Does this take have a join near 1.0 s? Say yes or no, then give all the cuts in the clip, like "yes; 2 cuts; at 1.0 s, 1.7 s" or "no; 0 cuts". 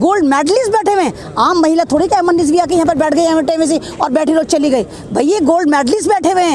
no; 0 cuts